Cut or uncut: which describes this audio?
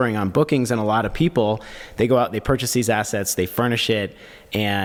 uncut